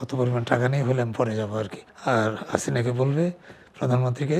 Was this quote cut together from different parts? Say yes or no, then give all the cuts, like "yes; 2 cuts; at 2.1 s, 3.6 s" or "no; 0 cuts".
yes; 1 cut; at 1.8 s